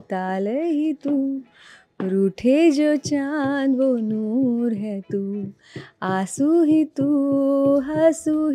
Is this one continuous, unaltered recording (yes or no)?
yes